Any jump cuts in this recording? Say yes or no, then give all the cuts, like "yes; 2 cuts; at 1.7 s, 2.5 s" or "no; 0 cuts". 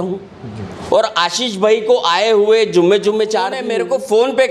yes; 1 cut; at 3.6 s